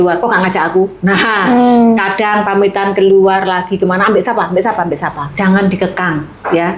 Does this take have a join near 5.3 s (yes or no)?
yes